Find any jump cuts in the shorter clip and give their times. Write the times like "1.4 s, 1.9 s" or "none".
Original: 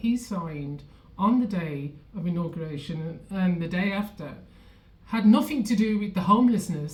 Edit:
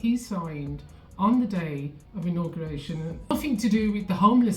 3.3 s